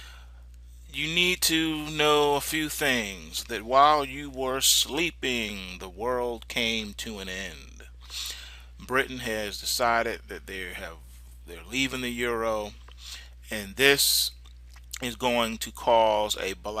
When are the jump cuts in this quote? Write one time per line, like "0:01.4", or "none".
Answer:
0:13.1